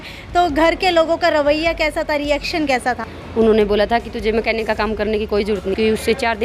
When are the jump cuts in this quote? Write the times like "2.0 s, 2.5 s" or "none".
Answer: 3.1 s, 5.7 s